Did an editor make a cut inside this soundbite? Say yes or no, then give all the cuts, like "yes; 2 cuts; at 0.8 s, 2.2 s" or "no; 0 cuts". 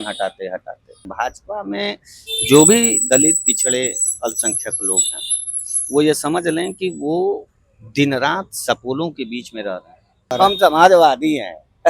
yes; 2 cuts; at 1.1 s, 10.3 s